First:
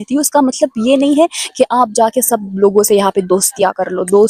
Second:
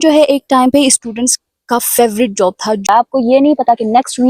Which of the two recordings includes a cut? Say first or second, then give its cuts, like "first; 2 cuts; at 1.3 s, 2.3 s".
second; 1 cut; at 2.8 s